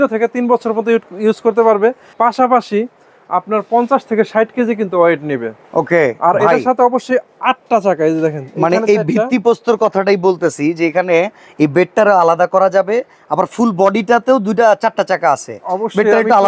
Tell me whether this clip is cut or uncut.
uncut